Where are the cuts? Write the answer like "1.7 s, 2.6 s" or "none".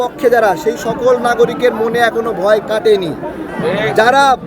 3.5 s